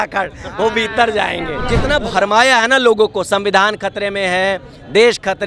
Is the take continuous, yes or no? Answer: no